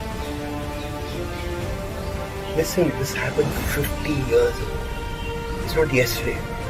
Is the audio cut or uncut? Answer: uncut